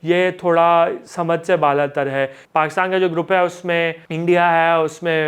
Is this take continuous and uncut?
no; 2 cuts; at 2.4 s, 4.1 s

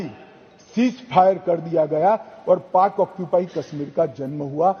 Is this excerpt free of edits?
yes; 0 cuts

